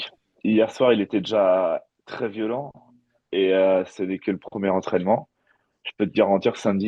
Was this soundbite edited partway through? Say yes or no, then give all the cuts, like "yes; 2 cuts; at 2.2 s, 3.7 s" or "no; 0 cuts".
no; 0 cuts